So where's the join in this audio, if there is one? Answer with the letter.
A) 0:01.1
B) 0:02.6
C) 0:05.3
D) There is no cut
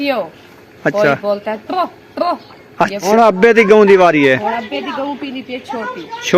B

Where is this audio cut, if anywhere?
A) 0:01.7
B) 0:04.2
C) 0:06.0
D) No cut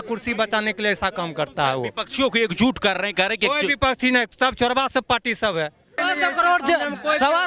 C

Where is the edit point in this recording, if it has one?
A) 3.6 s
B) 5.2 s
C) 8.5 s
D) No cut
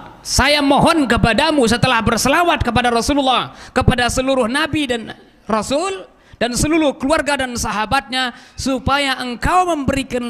D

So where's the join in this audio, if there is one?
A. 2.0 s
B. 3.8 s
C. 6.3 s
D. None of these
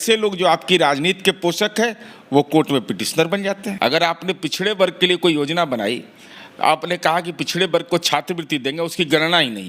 B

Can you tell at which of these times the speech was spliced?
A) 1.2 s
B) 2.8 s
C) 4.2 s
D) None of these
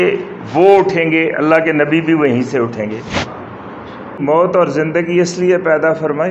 C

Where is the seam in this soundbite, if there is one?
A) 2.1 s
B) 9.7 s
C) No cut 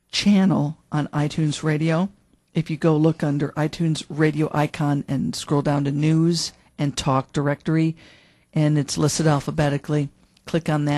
C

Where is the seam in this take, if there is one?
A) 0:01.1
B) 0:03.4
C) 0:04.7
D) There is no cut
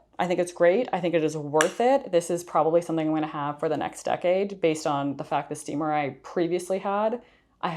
D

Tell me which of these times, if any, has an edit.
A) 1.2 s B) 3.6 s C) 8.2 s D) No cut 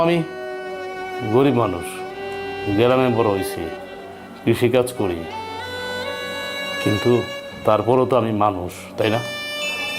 D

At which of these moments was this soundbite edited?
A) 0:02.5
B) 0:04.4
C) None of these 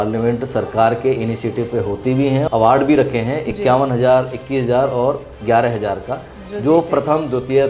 A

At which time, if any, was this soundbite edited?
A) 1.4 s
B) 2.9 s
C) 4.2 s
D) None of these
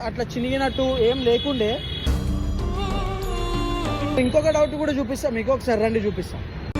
C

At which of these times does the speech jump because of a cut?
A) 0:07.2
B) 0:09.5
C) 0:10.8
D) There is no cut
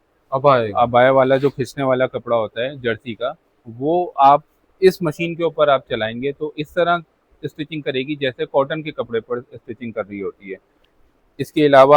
C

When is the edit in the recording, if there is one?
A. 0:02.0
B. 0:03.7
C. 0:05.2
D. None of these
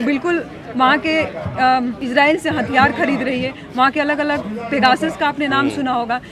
A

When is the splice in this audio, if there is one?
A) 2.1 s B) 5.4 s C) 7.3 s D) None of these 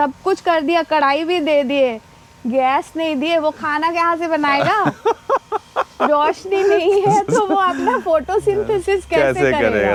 D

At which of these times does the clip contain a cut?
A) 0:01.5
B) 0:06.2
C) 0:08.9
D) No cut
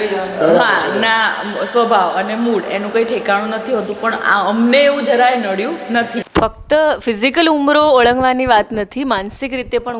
B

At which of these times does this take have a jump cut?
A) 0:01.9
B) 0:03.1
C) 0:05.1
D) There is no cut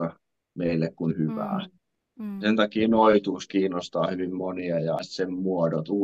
C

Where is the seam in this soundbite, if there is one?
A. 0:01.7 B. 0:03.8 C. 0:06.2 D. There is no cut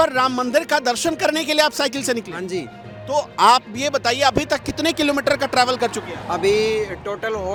D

